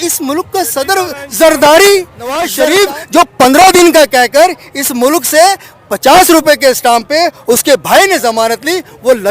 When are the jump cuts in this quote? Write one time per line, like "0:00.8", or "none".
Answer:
0:02.5